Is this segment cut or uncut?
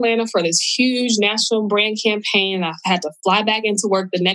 uncut